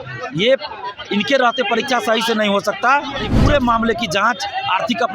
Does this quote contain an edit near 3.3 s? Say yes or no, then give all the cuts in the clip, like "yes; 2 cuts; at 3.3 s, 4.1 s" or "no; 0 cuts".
yes; 1 cut; at 3.3 s